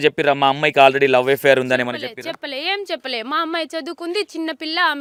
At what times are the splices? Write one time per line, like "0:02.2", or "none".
none